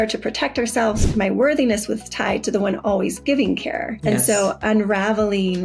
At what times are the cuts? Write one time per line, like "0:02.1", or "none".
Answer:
0:01.1
0:03.9